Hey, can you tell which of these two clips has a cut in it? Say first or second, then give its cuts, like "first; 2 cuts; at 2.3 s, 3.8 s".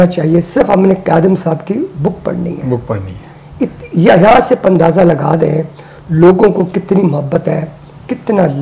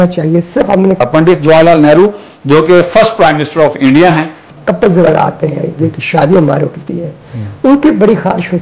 second; 2 cuts; at 1.0 s, 4.5 s